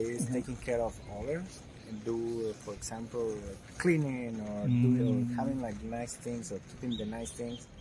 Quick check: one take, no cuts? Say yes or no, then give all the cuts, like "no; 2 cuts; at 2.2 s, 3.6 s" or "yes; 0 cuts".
yes; 0 cuts